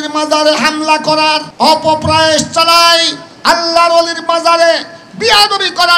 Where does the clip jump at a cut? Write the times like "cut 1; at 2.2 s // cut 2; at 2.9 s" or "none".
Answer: cut 1; at 1.5 s